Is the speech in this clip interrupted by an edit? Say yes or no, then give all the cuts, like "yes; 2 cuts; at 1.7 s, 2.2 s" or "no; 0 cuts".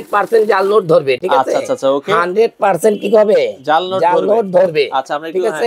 no; 0 cuts